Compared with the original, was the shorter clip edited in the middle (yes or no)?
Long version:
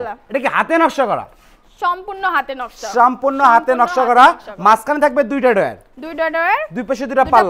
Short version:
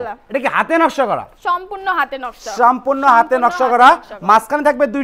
yes